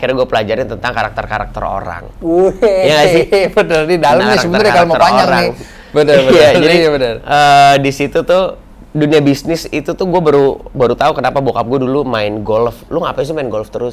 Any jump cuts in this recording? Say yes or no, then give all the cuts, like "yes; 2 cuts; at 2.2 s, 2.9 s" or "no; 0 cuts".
no; 0 cuts